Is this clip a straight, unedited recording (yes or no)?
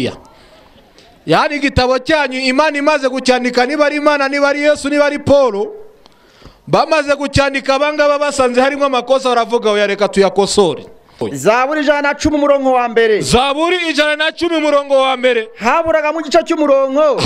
no